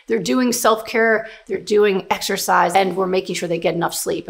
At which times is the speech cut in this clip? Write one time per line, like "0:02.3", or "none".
0:01.3
0:02.7